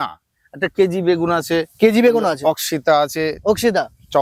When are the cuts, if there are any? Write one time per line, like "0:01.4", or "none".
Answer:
none